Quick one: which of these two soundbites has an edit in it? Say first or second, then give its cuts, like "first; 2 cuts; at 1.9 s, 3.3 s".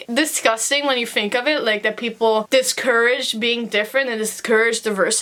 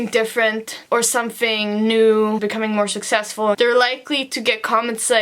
second; 2 cuts; at 2.4 s, 3.6 s